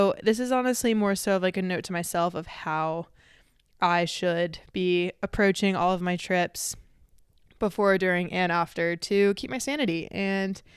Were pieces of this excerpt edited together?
no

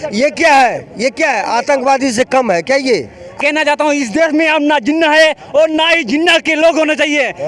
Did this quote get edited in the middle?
yes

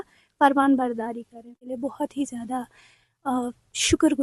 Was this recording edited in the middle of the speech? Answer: yes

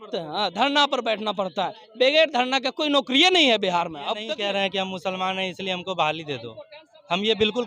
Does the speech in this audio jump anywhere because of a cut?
yes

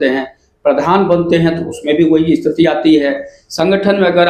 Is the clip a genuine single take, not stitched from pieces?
yes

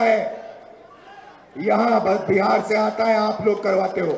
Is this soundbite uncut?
yes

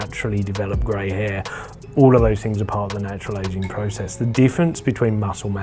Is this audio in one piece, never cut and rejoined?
yes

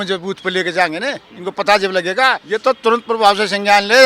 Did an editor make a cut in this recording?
yes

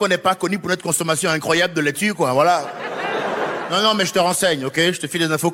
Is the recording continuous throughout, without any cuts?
yes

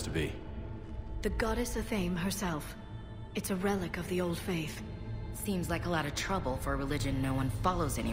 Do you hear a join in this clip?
no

